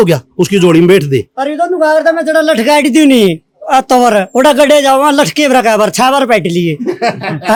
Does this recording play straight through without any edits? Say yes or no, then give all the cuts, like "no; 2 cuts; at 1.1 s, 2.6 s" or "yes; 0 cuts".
yes; 0 cuts